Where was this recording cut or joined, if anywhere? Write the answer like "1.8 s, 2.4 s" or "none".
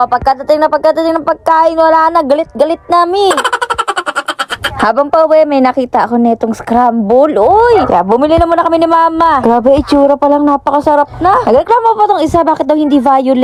none